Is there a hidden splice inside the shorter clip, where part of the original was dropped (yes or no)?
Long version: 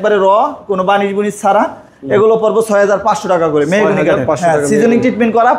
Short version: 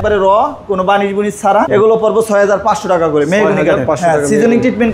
yes